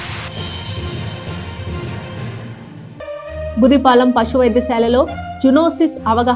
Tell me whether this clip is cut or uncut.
cut